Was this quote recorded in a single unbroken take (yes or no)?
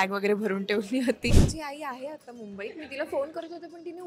no